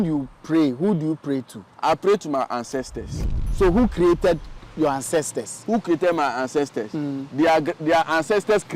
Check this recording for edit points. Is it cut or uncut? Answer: cut